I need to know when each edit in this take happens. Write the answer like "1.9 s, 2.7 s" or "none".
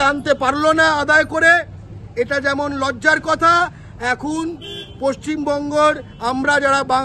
none